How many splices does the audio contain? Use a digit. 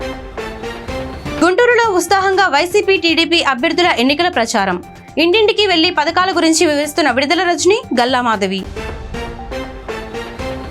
1